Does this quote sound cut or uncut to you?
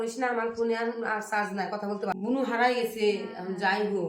cut